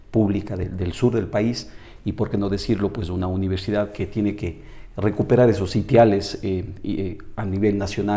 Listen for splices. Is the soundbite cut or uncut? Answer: uncut